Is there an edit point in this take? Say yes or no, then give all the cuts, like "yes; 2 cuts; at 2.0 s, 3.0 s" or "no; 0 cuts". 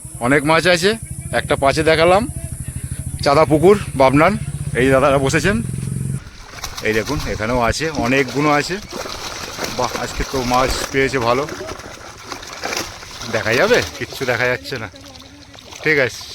yes; 1 cut; at 6.2 s